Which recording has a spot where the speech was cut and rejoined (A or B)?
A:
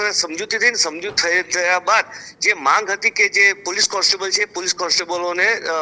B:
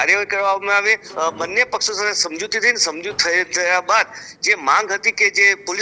B